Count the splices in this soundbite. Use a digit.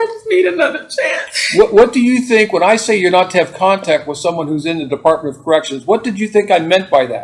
0